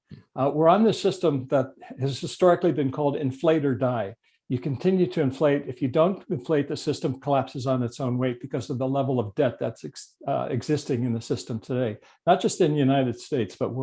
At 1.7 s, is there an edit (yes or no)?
no